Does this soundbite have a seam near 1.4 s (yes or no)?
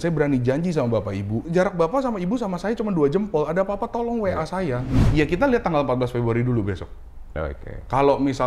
yes